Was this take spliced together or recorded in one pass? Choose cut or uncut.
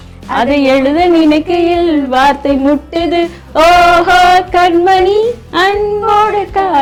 uncut